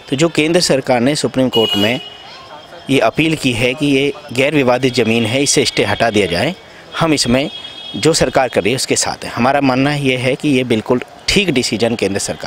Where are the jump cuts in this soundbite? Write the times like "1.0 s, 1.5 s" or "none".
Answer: none